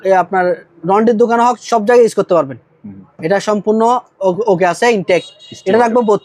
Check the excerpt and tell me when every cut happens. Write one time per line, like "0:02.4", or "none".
none